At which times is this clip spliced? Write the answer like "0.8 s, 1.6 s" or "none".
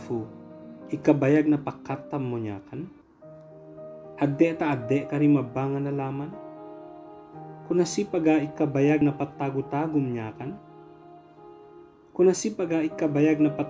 10.3 s, 12.1 s